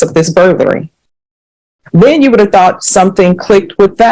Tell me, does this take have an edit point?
no; 0 cuts

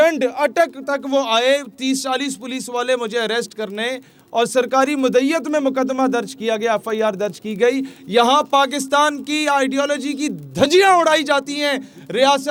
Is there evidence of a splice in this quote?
no; 0 cuts

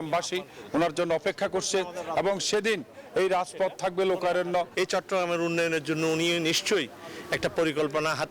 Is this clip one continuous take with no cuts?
no; 1 cut; at 4.7 s

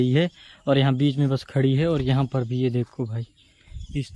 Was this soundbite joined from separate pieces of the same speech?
no; 0 cuts

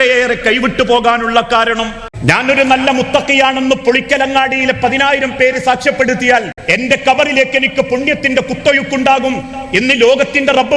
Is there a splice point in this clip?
yes; 2 cuts; at 2.0 s, 6.6 s

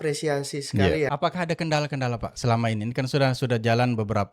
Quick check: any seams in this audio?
yes; 1 cut; at 1.1 s

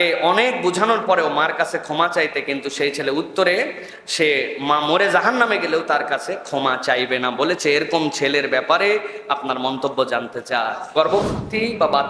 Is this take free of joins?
no; 1 cut; at 10.8 s

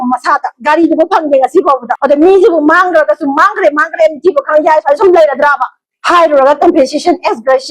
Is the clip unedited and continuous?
no; 1 cut; at 1.9 s

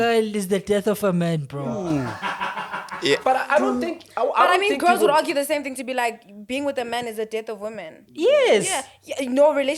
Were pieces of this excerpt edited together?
no; 0 cuts

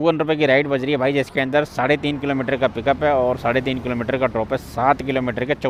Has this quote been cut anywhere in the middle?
no; 0 cuts

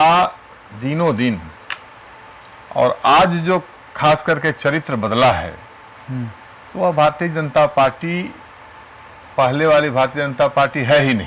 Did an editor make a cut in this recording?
no; 0 cuts

